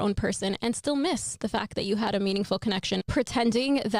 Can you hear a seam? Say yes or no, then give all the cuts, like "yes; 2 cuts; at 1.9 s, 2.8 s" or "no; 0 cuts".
yes; 1 cut; at 3.0 s